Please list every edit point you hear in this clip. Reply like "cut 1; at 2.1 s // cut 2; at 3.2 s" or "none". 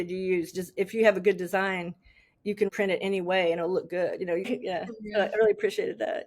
cut 1; at 2.7 s // cut 2; at 4.5 s